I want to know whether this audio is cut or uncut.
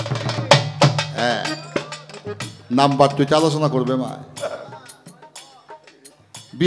uncut